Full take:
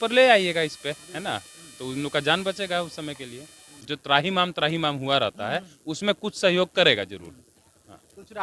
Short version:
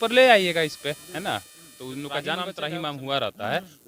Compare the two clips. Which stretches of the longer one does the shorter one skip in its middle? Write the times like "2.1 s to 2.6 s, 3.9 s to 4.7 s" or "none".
2.6 s to 4.6 s